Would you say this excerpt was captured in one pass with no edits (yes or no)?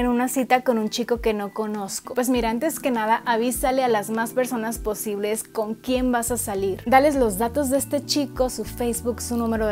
yes